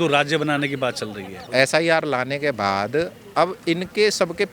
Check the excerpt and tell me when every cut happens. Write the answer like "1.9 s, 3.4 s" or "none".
1.5 s